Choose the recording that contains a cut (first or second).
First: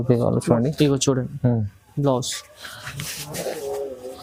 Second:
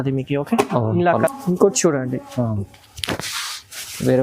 second